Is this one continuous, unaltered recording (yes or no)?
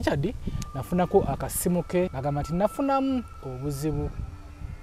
no